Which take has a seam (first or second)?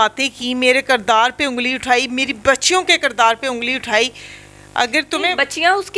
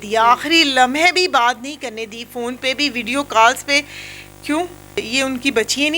second